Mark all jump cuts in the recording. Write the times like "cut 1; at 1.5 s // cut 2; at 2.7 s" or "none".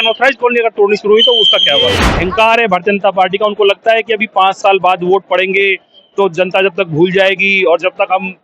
cut 1; at 2.1 s